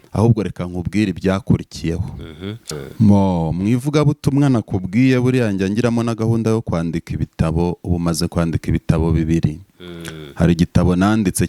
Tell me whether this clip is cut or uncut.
cut